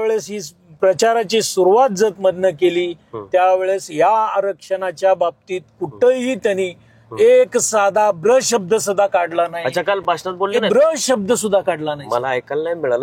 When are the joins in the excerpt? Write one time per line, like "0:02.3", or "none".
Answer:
none